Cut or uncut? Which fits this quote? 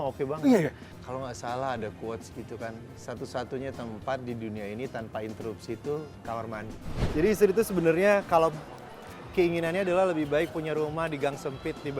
cut